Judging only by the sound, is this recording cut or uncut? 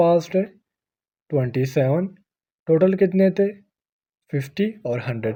uncut